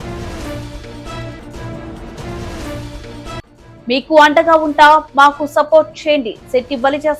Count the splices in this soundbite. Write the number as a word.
one